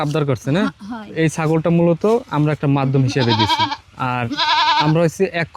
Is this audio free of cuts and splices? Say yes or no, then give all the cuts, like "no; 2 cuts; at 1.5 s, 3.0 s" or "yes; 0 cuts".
no; 1 cut; at 1.1 s